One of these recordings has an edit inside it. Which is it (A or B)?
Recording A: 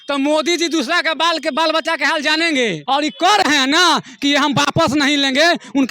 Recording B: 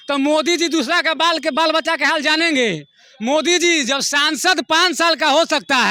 A